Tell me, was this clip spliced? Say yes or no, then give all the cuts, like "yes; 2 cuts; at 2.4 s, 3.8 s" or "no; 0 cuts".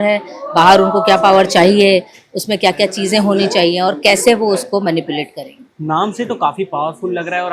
no; 0 cuts